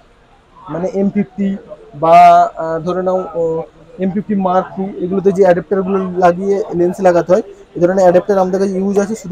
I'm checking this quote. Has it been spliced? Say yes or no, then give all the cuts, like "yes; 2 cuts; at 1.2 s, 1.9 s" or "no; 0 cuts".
no; 0 cuts